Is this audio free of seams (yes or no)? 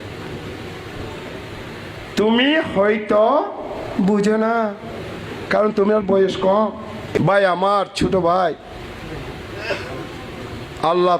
no